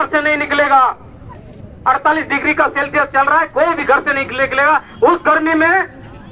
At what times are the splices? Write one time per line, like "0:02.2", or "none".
none